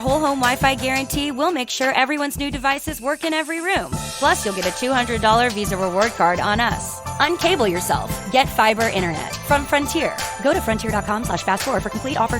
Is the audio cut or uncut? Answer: uncut